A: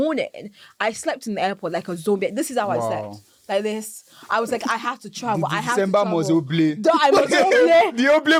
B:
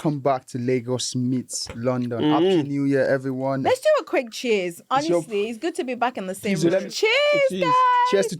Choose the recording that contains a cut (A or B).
B